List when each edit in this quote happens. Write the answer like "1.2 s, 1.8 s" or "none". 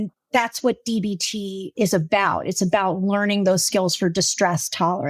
1.7 s